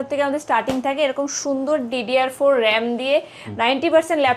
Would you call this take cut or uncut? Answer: uncut